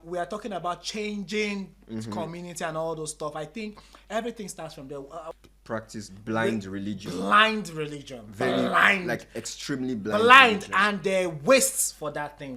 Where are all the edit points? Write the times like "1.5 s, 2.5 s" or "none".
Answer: 5.3 s